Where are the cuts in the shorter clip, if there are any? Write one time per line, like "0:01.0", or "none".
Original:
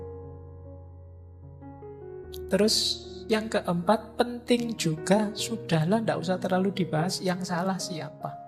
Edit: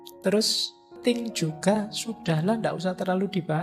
0:00.9